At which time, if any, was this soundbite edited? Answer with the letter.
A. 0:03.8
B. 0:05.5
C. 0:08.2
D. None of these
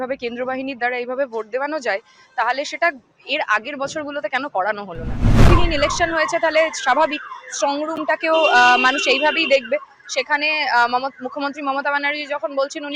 B